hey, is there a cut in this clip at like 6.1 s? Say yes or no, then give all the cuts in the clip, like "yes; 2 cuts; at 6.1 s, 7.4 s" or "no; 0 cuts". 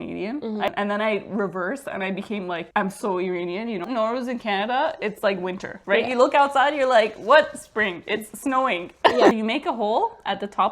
no; 3 cuts; at 0.7 s, 3.8 s, 9.3 s